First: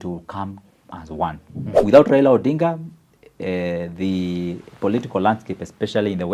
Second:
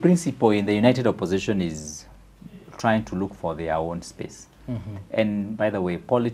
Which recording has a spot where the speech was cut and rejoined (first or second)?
first